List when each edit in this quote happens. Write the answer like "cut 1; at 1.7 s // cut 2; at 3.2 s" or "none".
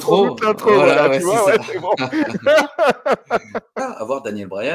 cut 1; at 3.8 s